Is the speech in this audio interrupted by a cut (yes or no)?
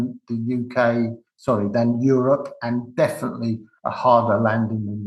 no